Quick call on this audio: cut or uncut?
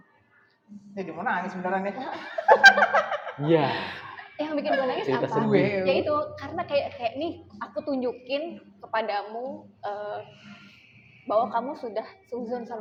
uncut